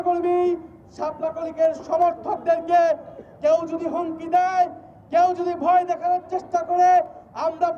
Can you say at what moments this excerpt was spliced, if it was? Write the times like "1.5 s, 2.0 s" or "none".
none